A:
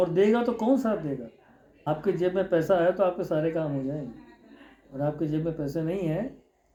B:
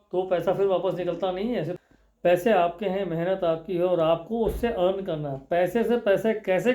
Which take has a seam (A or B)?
B